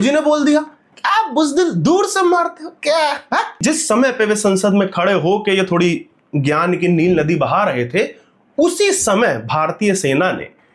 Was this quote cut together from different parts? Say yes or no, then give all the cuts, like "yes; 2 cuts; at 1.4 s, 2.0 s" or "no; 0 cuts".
yes; 1 cut; at 3.6 s